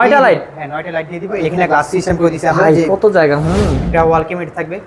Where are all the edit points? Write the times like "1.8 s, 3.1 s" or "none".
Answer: 1.5 s, 3.8 s